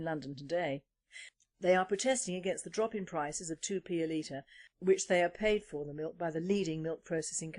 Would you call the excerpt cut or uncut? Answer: uncut